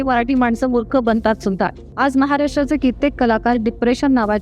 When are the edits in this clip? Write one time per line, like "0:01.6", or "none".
0:01.9

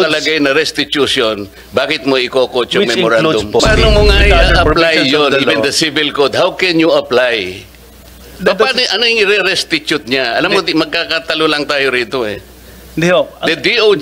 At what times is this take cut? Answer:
0:03.6

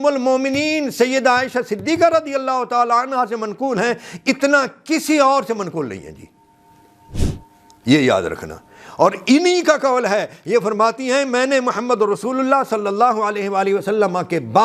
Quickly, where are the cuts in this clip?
0:07.1

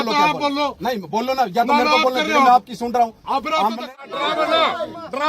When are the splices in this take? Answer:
0:03.9

